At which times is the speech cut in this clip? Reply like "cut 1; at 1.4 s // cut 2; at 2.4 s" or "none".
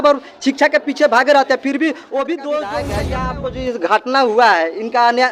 cut 1; at 3.1 s